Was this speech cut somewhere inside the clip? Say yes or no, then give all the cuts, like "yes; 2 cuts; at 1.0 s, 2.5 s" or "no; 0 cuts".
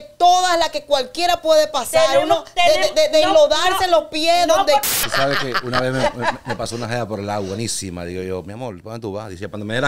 yes; 1 cut; at 4.9 s